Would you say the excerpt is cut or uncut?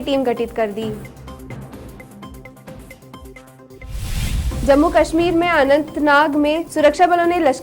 uncut